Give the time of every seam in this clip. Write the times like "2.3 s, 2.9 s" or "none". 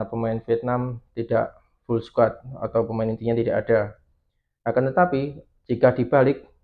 none